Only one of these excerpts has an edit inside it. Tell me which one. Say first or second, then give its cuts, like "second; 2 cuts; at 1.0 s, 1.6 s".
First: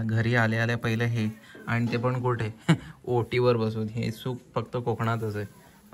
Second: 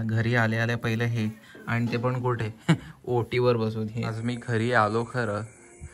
second; 1 cut; at 4.1 s